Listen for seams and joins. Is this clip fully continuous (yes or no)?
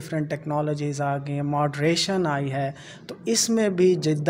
yes